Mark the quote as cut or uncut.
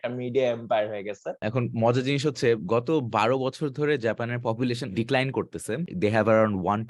cut